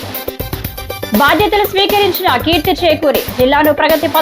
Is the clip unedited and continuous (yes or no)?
yes